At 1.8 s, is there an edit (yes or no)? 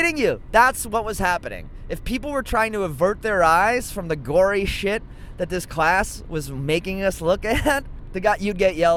no